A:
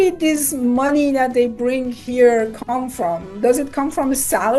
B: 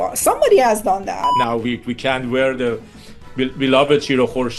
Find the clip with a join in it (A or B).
B